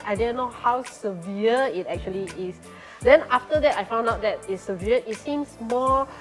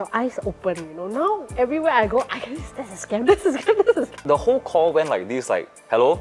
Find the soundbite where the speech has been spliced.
second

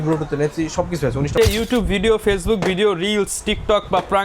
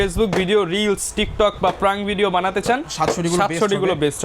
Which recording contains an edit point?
first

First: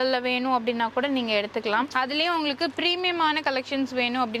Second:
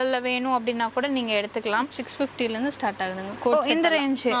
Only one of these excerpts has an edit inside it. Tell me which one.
first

